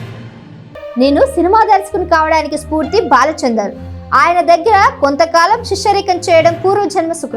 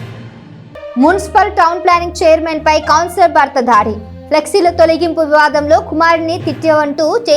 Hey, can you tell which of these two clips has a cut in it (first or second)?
second